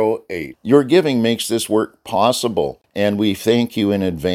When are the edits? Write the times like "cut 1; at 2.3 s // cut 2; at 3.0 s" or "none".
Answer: cut 1; at 2.8 s